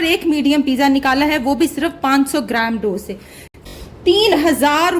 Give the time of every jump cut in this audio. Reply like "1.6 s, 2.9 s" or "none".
3.6 s

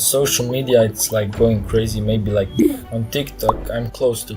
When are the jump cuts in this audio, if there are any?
none

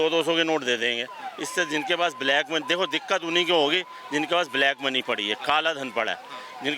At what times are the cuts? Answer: 1.2 s

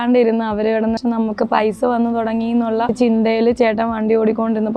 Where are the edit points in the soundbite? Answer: 1.0 s, 2.9 s

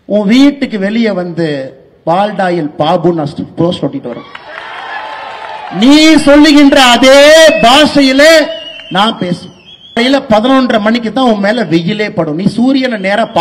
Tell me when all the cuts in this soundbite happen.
10.0 s

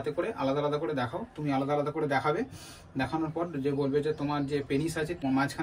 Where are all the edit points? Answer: none

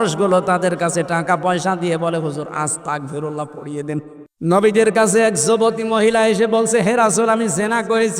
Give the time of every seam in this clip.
4.2 s

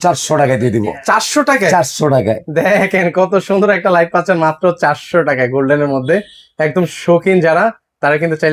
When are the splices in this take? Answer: none

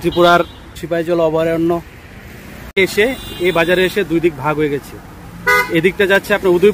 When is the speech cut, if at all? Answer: 0.8 s, 3.1 s

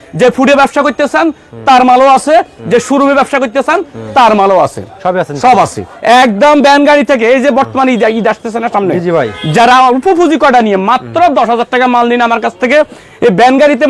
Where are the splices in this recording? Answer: none

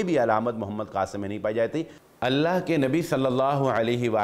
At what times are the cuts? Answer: 2.0 s

